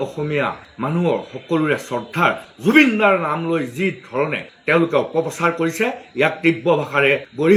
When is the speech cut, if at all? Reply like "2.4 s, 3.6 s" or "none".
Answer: none